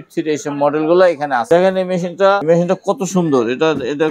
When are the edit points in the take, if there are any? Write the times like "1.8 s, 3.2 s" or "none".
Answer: 1.4 s, 2.4 s